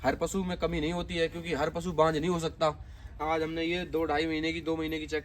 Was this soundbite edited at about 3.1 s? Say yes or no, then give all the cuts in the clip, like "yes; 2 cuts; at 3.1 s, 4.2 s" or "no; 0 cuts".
yes; 1 cut; at 3.1 s